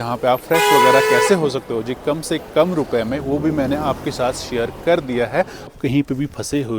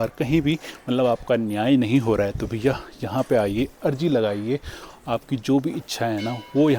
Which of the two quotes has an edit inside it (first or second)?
first